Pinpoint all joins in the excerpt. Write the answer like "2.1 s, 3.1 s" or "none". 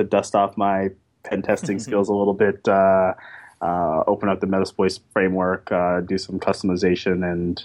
none